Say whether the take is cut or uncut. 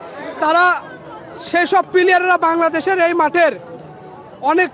uncut